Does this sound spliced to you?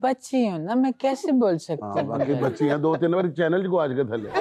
no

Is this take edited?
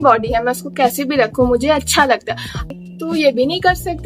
yes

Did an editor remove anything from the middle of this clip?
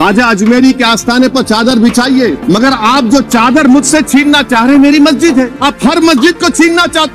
yes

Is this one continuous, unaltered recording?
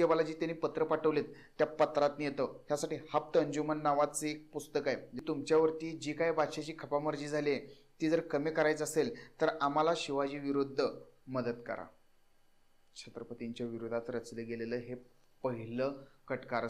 no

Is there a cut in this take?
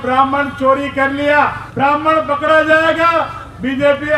yes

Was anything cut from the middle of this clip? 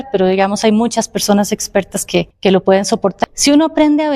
yes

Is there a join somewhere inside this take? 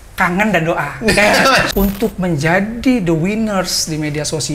yes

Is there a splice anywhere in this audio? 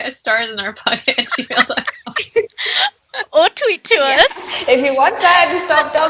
no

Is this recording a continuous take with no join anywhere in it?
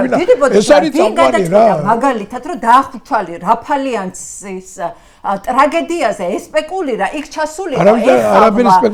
yes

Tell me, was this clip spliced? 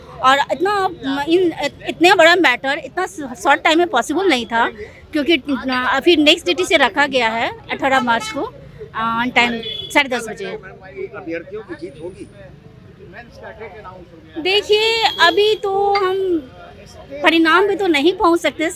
no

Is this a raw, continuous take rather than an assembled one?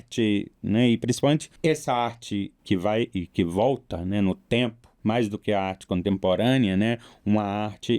no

